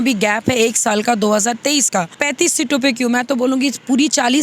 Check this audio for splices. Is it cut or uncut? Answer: cut